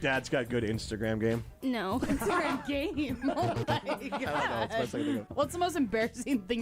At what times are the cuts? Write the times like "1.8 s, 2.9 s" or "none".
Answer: 5.3 s